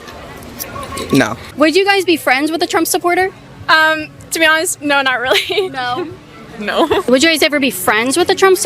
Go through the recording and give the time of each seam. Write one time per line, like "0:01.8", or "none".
0:01.5
0:07.1